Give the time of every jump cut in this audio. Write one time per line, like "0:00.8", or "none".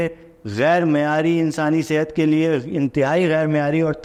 none